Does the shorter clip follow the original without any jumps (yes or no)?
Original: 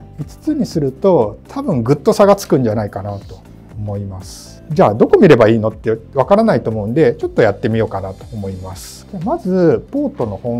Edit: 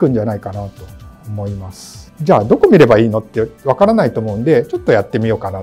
yes